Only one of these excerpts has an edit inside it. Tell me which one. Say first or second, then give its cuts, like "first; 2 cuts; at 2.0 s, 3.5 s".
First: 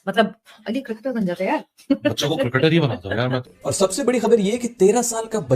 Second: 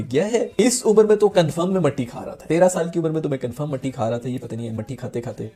first; 1 cut; at 3.5 s